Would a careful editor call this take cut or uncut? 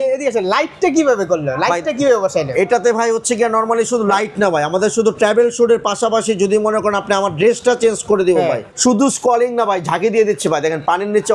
cut